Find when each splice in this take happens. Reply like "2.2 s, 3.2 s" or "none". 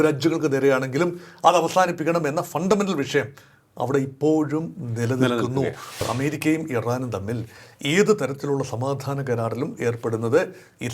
6.0 s